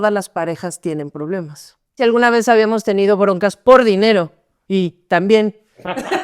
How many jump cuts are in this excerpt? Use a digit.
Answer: 1